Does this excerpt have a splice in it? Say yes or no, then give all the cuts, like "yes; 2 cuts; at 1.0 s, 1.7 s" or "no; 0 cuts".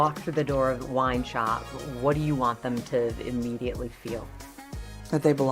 no; 0 cuts